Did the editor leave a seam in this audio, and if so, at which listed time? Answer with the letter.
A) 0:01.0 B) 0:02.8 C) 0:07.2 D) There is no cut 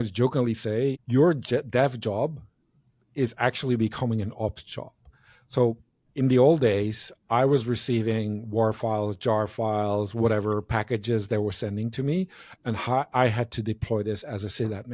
A